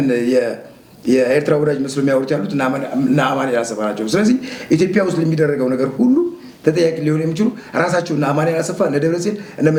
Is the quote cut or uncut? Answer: uncut